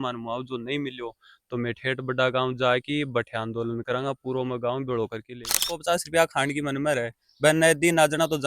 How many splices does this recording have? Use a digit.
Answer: 1